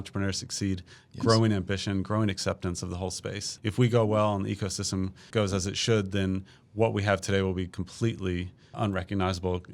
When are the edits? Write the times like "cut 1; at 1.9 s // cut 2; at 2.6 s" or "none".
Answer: cut 1; at 3.5 s // cut 2; at 5.2 s // cut 3; at 8.7 s